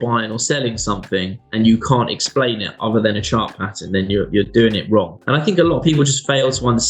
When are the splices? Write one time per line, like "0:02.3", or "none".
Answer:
0:05.2